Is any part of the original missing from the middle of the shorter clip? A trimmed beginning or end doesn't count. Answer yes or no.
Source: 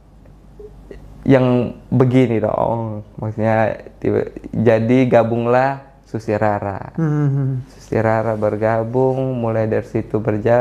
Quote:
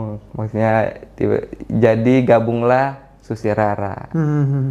no